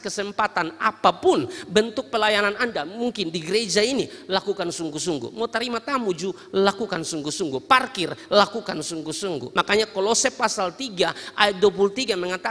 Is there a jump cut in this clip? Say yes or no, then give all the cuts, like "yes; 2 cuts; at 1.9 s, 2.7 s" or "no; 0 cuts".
yes; 1 cut; at 9.4 s